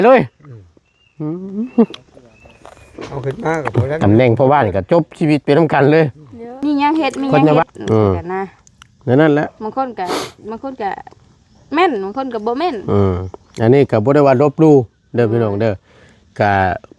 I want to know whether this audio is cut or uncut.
cut